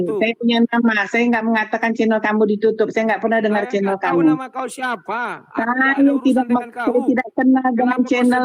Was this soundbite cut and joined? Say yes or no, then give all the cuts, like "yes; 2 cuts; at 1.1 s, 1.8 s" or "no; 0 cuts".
no; 0 cuts